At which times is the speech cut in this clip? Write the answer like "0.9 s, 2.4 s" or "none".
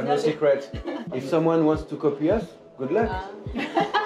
1.1 s